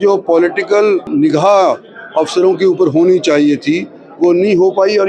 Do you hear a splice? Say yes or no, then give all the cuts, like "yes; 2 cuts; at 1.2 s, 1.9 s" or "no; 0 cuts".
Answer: yes; 1 cut; at 1.1 s